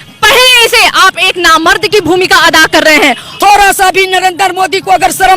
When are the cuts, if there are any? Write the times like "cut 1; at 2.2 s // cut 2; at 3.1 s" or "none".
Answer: cut 1; at 3.3 s